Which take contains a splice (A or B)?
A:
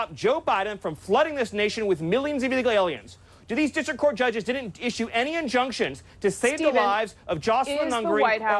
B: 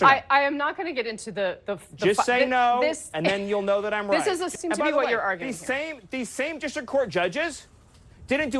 B